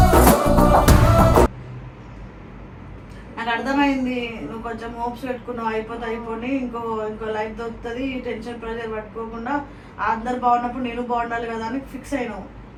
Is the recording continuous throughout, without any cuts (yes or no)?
yes